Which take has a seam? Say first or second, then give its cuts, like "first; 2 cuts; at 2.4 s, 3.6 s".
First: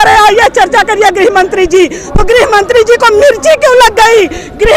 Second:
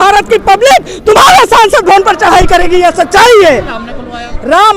second; 1 cut; at 3.7 s